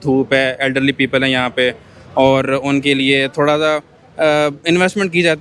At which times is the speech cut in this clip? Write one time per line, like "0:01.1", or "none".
none